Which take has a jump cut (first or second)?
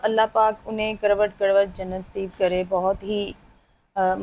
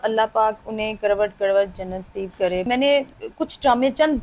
second